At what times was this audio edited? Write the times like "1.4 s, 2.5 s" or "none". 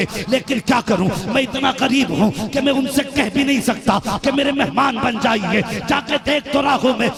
none

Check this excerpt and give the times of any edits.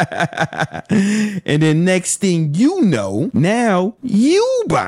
3.3 s

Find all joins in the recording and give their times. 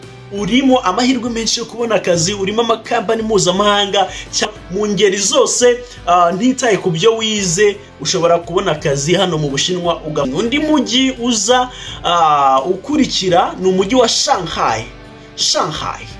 4.5 s, 10.3 s

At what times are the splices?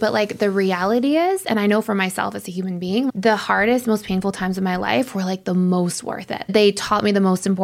3.1 s, 6.5 s

